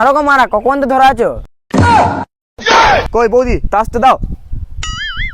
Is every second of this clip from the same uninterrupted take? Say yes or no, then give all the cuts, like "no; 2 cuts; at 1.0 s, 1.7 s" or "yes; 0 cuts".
no; 1 cut; at 3.1 s